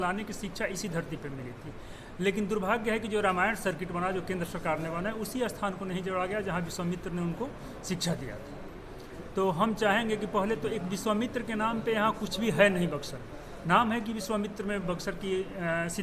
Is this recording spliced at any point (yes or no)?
no